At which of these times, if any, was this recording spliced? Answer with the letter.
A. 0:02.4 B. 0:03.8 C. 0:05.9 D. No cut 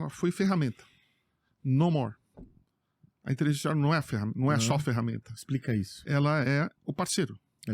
D